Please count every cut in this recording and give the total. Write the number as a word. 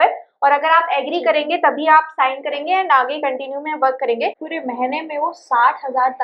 one